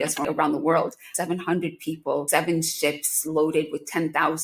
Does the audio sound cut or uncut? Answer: cut